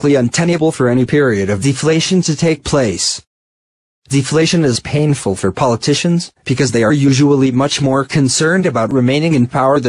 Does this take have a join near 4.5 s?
yes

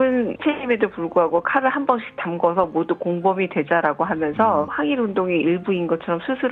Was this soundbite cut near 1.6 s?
no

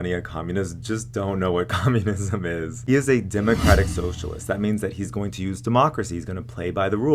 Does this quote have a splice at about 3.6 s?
no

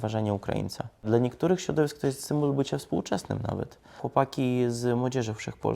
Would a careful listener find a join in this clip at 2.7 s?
no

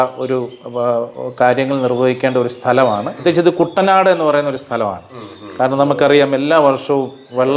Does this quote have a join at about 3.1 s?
yes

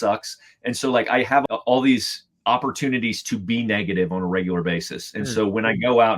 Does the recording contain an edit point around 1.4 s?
yes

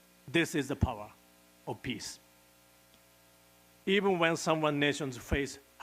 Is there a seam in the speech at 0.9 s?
no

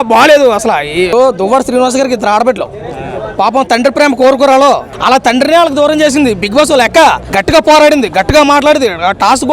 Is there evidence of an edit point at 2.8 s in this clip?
no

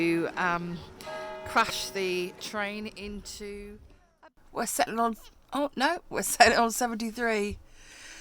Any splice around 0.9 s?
no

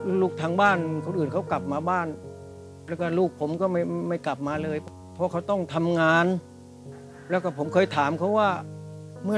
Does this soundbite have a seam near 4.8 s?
yes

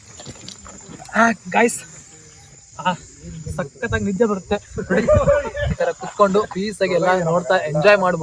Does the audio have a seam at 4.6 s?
no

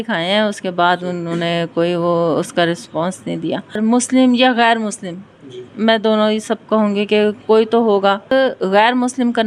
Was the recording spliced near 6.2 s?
no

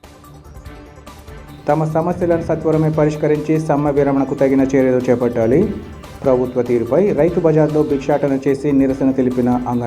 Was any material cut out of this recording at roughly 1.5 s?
yes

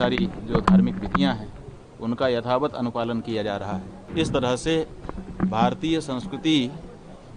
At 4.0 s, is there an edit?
yes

